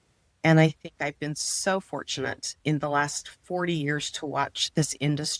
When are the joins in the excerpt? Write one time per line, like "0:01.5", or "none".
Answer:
0:02.5